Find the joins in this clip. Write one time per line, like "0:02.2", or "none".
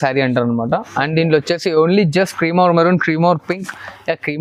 none